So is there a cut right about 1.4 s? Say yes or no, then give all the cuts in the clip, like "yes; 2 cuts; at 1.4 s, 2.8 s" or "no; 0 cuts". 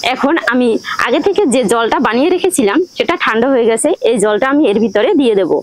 no; 0 cuts